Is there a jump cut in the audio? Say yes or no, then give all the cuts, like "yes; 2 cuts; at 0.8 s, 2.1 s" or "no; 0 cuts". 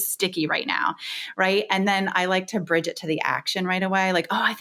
no; 0 cuts